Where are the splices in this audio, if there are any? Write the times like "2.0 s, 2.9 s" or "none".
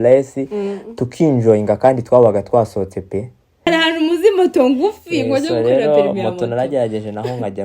3.7 s